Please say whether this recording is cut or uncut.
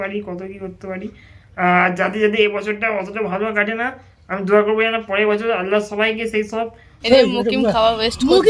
cut